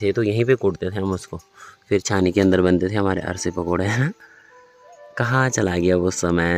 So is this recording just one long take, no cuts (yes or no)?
yes